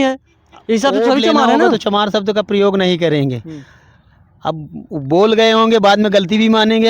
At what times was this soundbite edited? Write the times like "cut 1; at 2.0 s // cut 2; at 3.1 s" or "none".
cut 1; at 1.7 s